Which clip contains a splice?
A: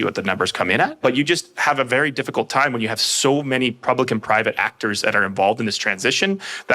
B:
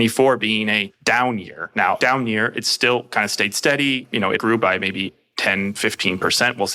B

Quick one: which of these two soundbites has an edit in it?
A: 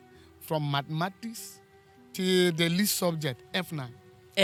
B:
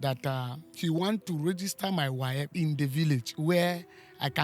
B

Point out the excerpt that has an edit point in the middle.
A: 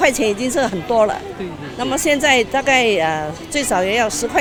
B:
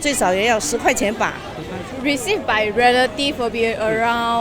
B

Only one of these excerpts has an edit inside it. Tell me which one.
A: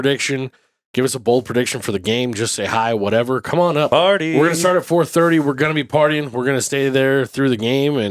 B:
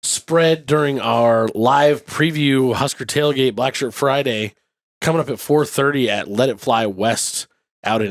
A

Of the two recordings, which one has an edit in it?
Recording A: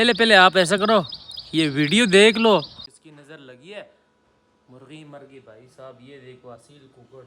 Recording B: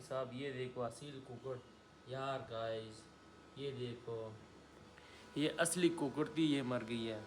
A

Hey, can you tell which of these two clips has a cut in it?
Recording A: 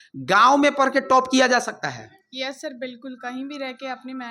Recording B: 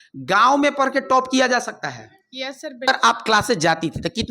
B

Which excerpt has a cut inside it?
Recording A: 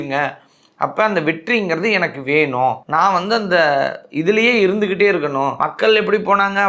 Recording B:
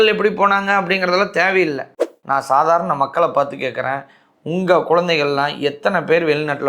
B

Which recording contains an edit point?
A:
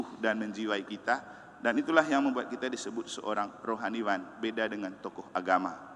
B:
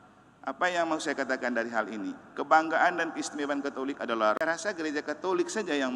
B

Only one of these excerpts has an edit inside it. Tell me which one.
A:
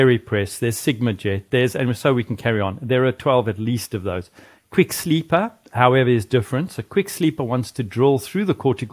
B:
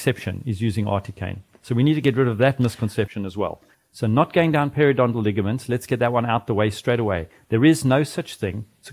B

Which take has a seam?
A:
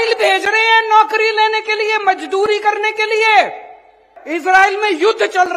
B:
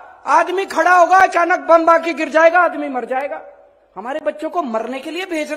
A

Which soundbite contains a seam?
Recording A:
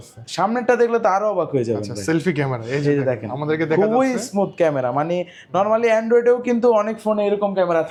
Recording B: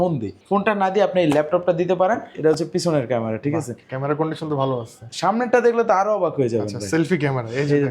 B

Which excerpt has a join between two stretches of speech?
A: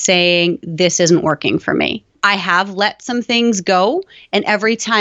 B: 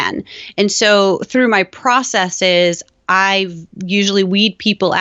A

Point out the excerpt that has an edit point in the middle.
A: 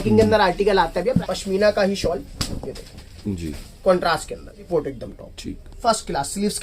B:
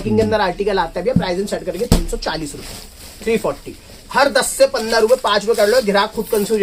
A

